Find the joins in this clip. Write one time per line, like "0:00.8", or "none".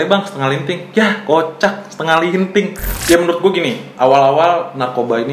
0:02.9